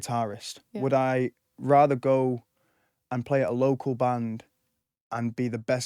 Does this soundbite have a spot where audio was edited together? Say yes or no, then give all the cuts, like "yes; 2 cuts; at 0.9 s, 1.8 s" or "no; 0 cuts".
no; 0 cuts